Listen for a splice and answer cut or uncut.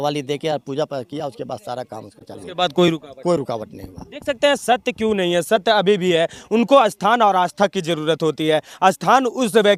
uncut